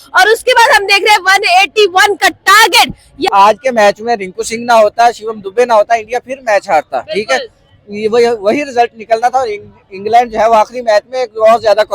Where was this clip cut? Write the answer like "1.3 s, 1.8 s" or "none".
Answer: 3.1 s

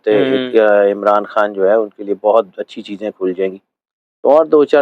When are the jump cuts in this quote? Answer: none

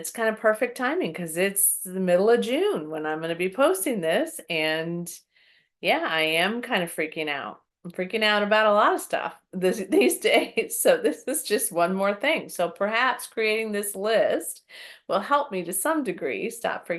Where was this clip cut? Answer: none

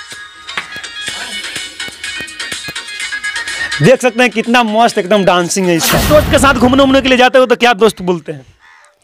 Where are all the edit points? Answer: 6.0 s

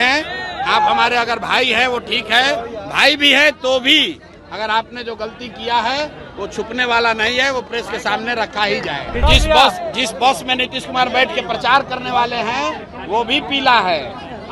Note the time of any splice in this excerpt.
9.2 s

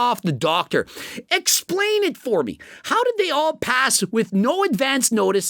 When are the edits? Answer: none

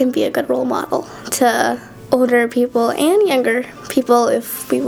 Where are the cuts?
1.9 s

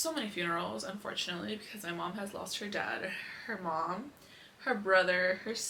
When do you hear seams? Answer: none

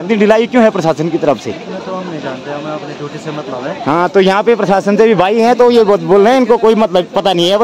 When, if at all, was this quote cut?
none

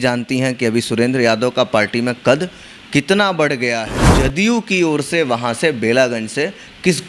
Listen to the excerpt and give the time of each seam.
4.1 s

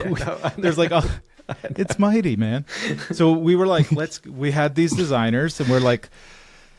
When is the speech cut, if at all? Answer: none

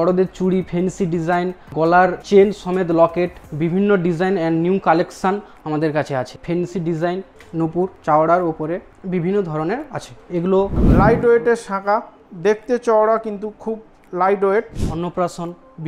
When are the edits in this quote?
1.8 s, 3.4 s, 6.4 s, 10.8 s, 14.8 s

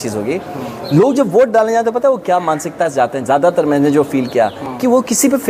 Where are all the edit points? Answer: none

